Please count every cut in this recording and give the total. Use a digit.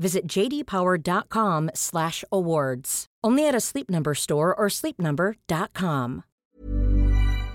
1